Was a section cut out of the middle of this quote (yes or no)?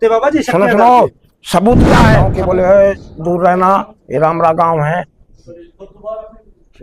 yes